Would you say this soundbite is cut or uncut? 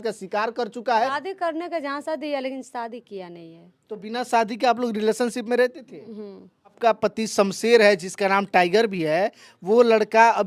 cut